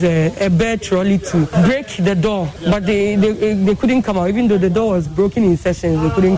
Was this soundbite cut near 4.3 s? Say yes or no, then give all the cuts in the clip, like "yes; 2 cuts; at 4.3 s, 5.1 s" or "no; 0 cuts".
no; 2 cuts; at 1.5 s, 2.6 s